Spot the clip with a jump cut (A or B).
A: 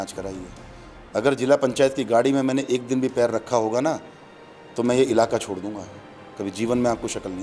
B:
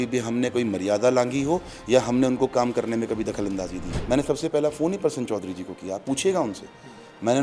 B